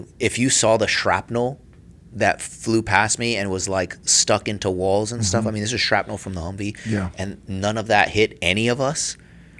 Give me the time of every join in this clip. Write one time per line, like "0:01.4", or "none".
none

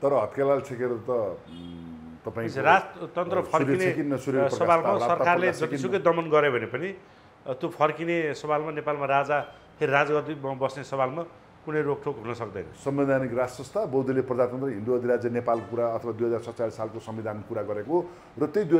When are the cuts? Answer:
0:12.7

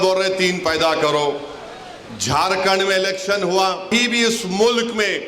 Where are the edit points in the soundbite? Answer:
0:03.9

